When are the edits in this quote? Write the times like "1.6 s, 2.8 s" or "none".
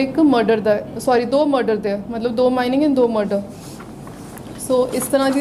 none